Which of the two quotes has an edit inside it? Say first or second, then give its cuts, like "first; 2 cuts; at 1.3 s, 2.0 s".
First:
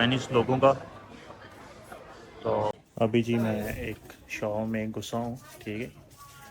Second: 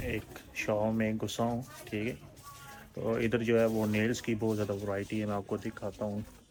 first; 1 cut; at 2.7 s